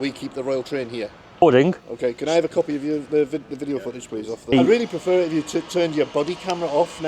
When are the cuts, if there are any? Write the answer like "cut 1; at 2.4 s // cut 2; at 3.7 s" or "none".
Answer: cut 1; at 1.4 s // cut 2; at 4.5 s